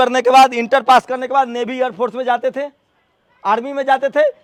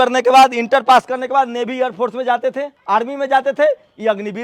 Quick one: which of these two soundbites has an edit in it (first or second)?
second